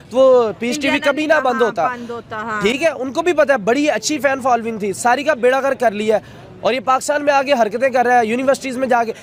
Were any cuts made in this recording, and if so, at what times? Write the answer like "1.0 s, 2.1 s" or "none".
none